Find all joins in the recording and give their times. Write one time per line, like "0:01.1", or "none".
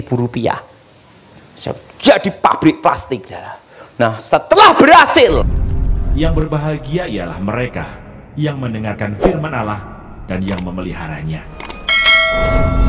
0:05.6